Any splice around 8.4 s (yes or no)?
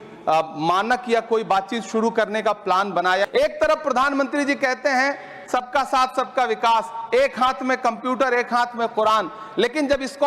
no